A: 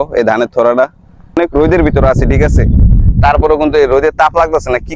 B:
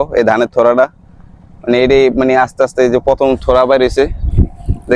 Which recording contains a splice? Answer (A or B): A